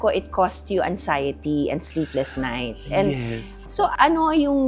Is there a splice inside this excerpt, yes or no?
no